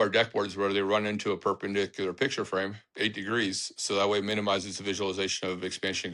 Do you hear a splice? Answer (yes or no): no